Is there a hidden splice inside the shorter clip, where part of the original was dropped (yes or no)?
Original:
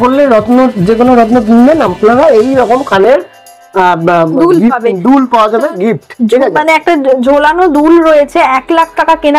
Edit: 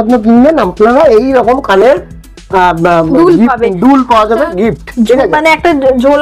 no